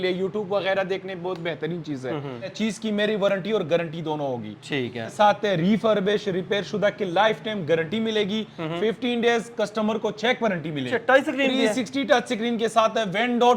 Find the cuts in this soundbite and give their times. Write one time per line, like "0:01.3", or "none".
0:02.5
0:05.1
0:10.9